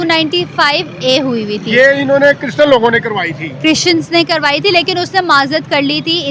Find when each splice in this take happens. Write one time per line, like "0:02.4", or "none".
none